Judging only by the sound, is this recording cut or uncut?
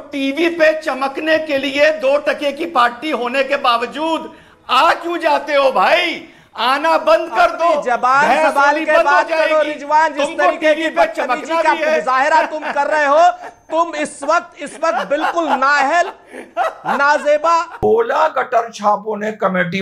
cut